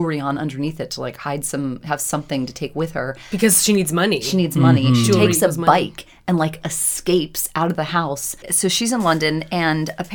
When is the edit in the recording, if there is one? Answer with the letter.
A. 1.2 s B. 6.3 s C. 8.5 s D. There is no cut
C